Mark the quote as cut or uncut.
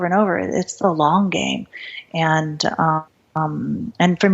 cut